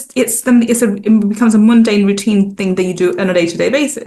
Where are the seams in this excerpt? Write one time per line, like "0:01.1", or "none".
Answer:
none